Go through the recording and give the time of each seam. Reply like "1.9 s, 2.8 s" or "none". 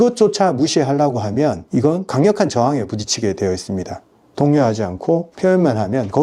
4.3 s